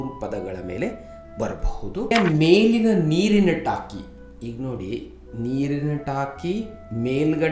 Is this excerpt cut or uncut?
cut